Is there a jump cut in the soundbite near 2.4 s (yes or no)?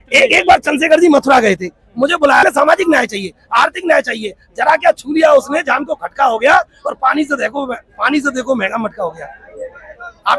yes